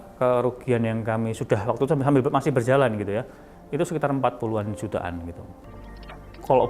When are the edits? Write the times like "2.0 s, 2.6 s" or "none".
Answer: 5.6 s